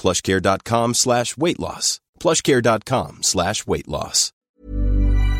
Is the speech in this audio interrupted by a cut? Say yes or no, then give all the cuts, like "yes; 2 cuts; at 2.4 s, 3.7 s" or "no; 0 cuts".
yes; 1 cut; at 4.4 s